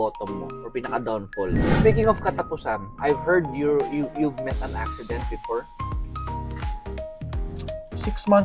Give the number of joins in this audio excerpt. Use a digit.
1